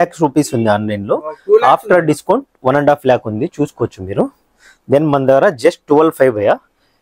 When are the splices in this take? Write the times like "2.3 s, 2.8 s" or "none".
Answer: none